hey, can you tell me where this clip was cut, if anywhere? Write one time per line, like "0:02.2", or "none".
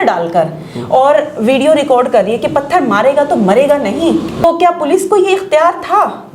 0:04.4